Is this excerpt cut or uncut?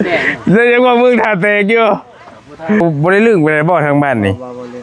cut